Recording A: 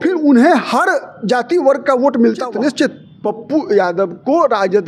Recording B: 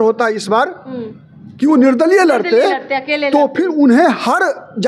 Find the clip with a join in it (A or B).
A